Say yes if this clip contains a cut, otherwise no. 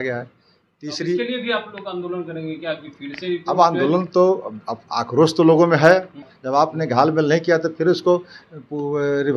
yes